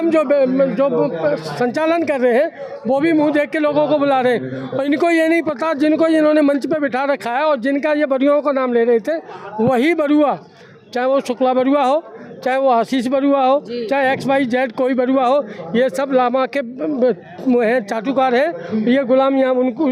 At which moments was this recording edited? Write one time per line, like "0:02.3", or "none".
none